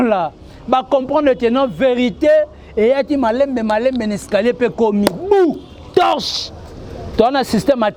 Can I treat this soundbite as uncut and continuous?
yes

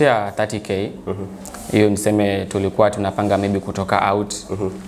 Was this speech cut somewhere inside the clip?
no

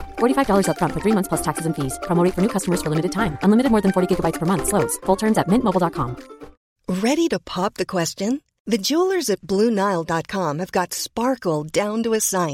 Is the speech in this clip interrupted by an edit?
no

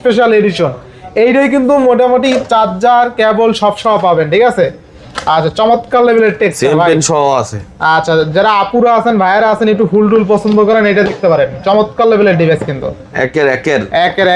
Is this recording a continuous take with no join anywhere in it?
yes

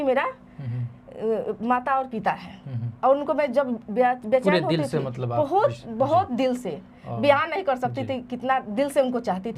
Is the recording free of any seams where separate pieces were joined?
yes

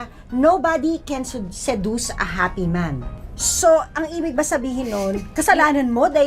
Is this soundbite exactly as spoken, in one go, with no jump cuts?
yes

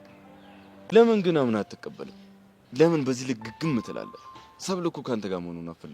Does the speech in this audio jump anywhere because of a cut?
yes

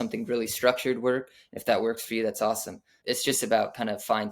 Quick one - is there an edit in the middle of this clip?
yes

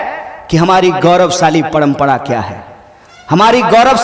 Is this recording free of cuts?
yes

